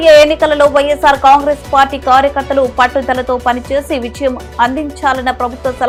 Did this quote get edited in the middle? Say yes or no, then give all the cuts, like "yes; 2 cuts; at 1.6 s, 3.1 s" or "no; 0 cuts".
no; 0 cuts